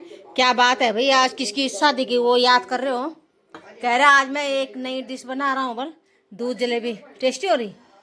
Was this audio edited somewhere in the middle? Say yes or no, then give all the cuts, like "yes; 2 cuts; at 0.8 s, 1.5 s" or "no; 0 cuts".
no; 0 cuts